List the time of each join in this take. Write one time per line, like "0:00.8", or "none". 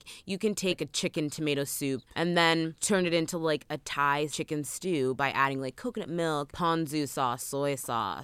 0:00.8
0:02.1
0:02.8
0:04.4
0:06.5

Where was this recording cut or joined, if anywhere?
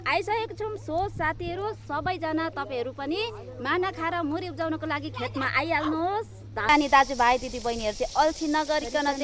0:06.7

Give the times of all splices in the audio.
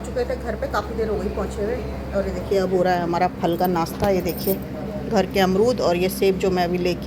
none

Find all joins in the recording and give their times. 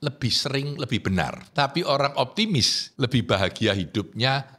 0:01.5
0:02.8

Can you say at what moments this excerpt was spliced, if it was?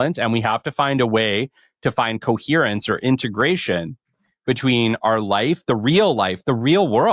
none

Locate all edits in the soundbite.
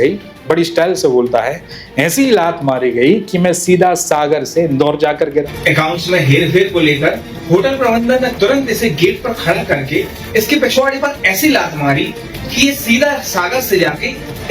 0:05.5

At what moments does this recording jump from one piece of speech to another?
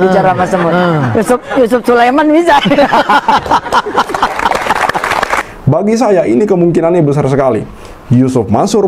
0:05.5

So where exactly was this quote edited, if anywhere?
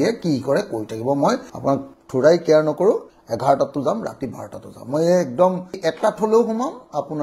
0:03.1
0:05.7

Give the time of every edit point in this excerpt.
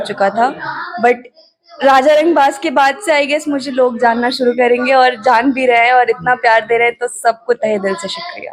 none

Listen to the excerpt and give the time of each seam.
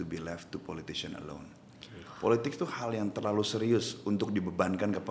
none

